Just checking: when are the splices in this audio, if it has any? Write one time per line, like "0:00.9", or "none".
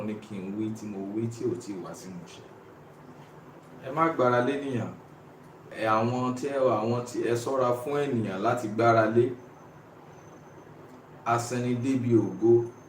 0:05.7